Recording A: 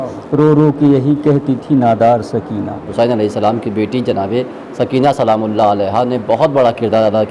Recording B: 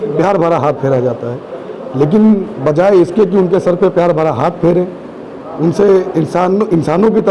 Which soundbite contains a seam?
A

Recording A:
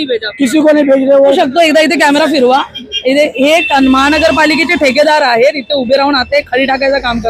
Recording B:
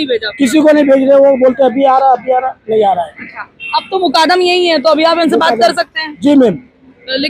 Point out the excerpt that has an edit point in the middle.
A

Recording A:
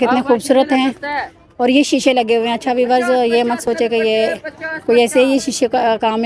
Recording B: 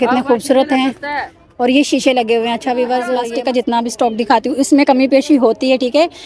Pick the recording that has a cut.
B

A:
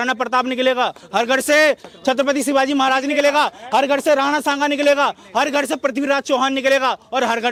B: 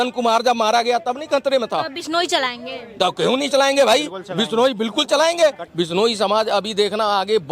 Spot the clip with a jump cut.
B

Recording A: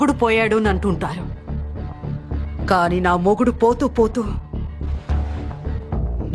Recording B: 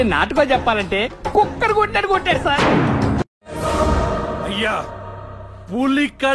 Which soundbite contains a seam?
B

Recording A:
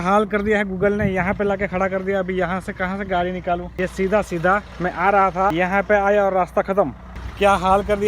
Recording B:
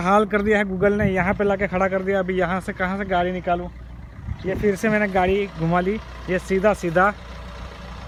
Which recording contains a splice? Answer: A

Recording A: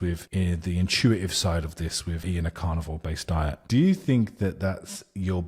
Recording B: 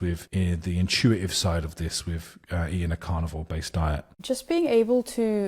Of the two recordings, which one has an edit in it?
A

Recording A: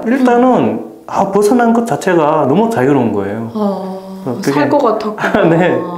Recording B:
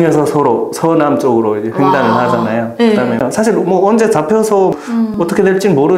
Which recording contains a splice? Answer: B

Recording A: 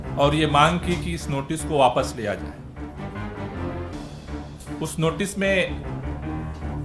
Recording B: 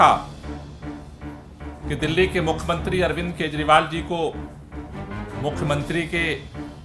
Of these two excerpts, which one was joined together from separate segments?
A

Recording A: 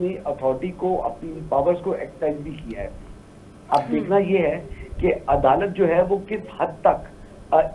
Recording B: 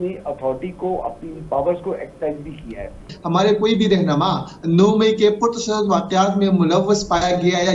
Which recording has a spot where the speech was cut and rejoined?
B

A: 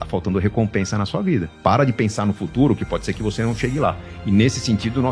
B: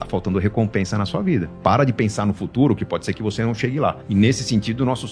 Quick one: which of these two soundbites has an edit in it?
B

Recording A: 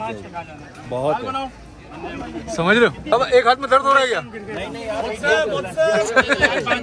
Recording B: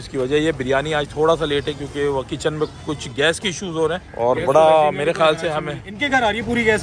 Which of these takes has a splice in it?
A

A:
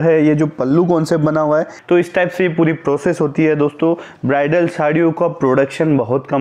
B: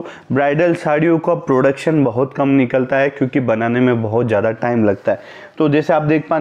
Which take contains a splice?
A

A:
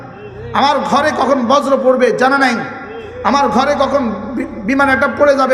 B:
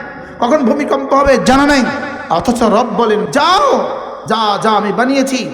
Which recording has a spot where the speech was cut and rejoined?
B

